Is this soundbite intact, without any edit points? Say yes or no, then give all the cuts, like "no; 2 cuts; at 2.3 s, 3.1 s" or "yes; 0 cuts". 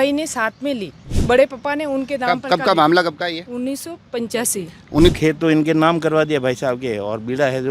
no; 2 cuts; at 1.2 s, 5.1 s